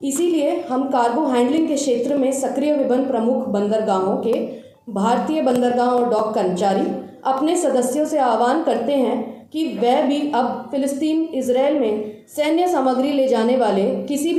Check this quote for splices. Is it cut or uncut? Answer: uncut